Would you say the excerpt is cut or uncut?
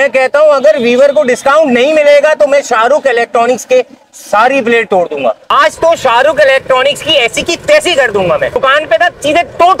cut